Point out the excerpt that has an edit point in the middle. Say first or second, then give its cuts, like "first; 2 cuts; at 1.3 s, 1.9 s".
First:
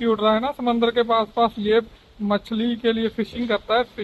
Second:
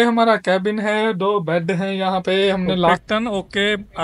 second; 1 cut; at 3.0 s